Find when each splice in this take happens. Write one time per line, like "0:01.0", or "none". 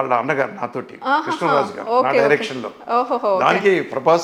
none